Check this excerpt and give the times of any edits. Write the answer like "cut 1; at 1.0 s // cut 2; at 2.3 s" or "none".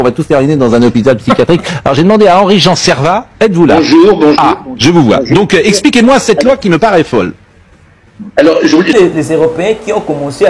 cut 1; at 8.9 s